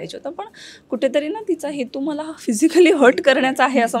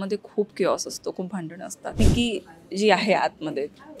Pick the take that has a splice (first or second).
second